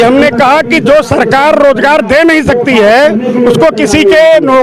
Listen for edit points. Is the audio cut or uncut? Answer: uncut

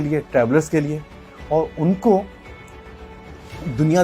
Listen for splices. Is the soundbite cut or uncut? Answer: uncut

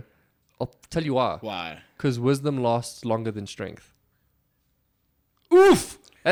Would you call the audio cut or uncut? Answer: uncut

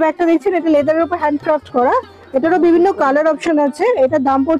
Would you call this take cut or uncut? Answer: uncut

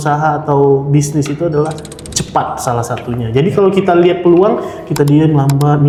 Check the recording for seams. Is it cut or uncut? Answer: uncut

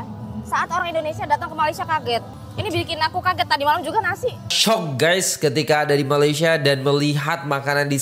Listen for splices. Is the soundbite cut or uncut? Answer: cut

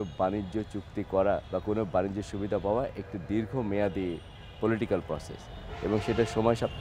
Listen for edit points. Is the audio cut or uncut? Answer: cut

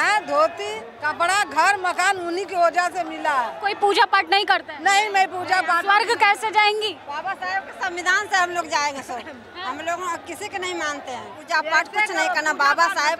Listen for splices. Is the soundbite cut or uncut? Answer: cut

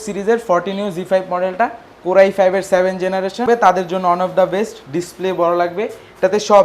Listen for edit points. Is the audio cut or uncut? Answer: cut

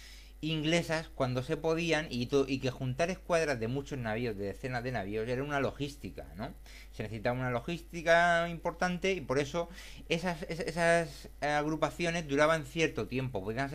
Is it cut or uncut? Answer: cut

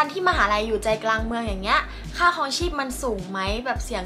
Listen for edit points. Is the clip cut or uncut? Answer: uncut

